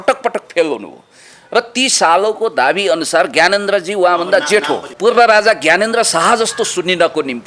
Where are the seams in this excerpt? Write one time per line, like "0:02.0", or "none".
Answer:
0:05.0